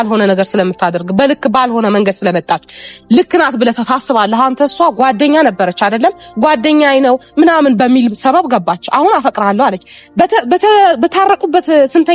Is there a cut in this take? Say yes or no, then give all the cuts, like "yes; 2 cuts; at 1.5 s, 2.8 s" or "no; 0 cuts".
no; 0 cuts